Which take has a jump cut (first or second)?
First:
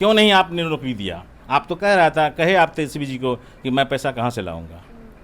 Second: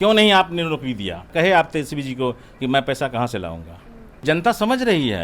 second